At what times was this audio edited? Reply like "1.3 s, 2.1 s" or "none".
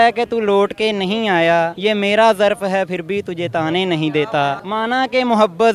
1.7 s, 4.6 s